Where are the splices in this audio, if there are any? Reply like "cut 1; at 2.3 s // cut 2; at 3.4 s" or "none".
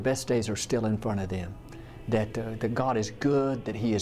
none